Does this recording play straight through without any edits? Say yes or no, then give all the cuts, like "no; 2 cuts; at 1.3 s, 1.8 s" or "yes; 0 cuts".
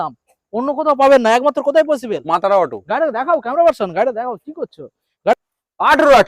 no; 1 cut; at 5.3 s